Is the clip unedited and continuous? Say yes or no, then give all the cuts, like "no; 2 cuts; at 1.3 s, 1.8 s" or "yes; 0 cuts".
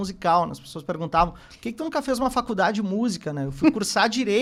yes; 0 cuts